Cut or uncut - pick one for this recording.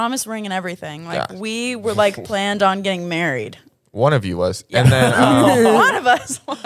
uncut